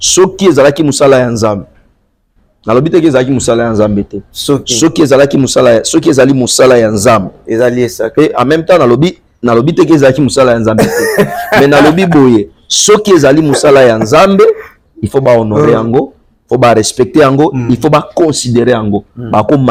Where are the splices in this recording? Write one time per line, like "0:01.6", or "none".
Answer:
none